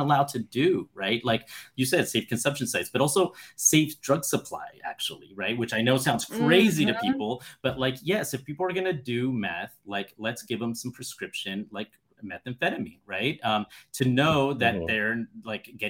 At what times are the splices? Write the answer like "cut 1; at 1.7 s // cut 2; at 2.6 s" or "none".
none